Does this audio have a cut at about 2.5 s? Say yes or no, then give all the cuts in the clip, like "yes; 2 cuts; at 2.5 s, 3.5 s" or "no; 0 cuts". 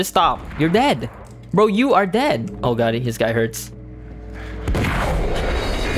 yes; 1 cut; at 2.5 s